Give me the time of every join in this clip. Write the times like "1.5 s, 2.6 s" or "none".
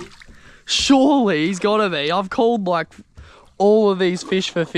none